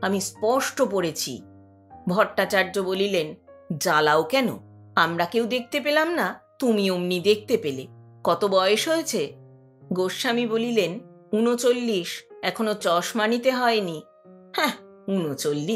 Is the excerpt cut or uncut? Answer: cut